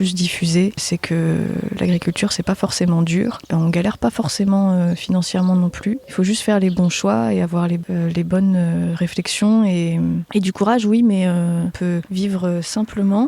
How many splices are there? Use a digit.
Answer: 3